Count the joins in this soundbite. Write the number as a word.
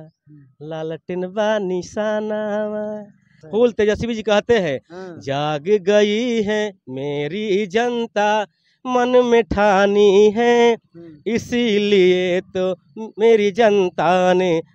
one